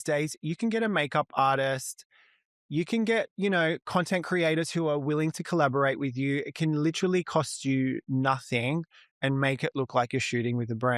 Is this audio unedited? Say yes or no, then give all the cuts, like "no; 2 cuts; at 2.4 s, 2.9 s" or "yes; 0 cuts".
yes; 0 cuts